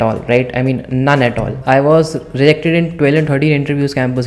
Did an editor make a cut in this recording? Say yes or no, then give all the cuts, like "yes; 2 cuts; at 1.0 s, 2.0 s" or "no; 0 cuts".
yes; 1 cut; at 1.6 s